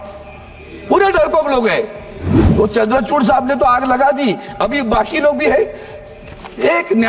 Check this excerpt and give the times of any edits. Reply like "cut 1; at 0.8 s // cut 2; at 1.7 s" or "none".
none